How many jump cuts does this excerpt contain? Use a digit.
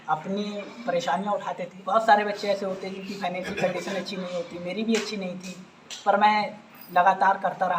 1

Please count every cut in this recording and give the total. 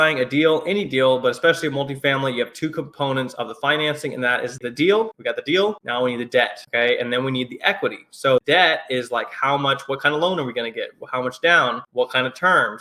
0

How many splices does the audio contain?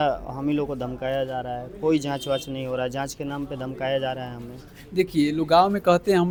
0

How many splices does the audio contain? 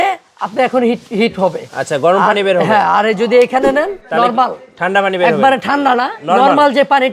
0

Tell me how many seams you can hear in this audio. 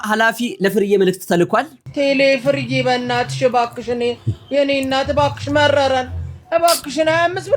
1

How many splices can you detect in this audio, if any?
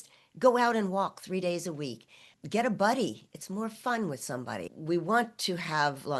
2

